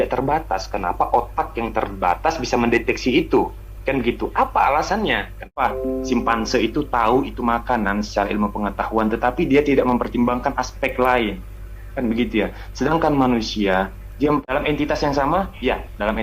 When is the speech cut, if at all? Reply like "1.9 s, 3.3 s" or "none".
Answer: 5.6 s, 14.5 s